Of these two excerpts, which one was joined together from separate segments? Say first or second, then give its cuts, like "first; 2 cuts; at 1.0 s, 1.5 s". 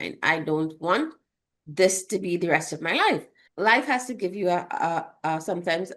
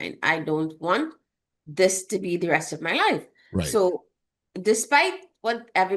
first; 1 cut; at 3.4 s